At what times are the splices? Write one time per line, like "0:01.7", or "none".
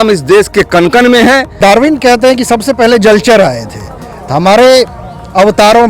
0:01.6